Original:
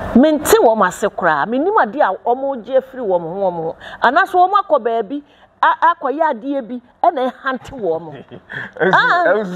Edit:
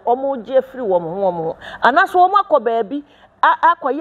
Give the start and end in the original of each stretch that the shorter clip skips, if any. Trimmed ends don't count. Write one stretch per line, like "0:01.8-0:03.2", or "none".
none